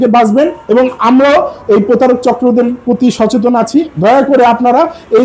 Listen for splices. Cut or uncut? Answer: uncut